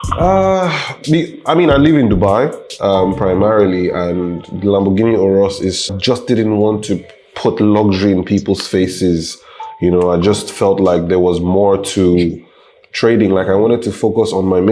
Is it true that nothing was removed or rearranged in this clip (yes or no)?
no